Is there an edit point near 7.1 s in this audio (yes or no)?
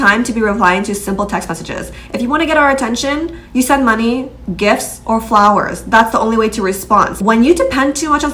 yes